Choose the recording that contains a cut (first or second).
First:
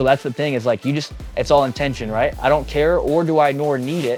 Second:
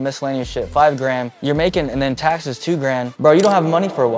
second